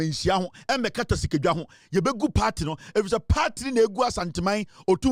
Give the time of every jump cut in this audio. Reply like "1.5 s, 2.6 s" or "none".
none